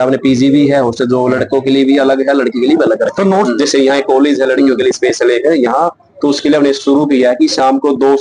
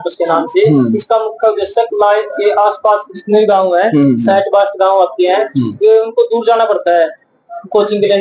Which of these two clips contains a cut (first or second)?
first